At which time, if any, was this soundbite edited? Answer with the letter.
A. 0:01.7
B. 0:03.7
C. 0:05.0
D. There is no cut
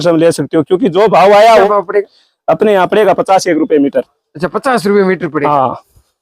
A